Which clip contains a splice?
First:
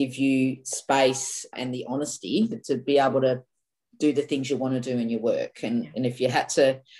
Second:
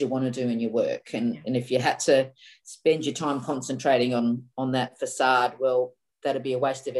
first; 1 cut; at 2.6 s

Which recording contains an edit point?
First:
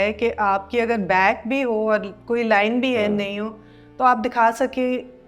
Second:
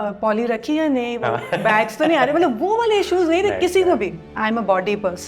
second; 1 cut; at 4.4 s

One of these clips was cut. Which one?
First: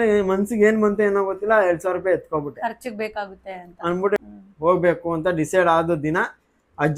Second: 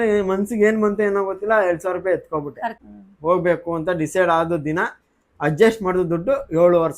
second; 1 cut; at 2.9 s

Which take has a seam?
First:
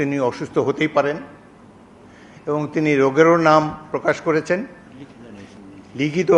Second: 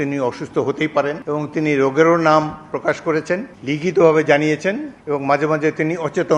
second; 3 cuts; at 1.2 s, 3.5 s, 4.9 s

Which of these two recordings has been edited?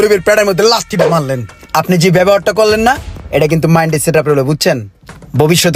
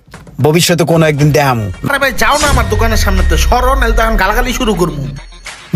second; 1 cut; at 1.9 s

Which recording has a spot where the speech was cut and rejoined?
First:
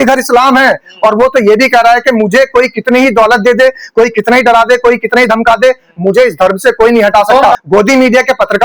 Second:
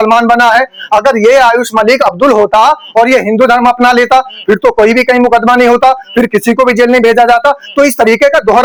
first; 1 cut; at 7.6 s

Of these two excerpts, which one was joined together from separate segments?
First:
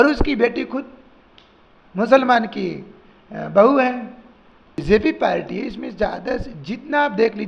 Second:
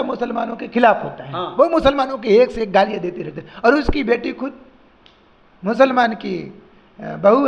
first; 1 cut; at 4.8 s

